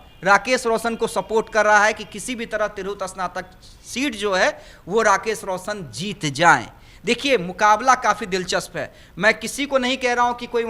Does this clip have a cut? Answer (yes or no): no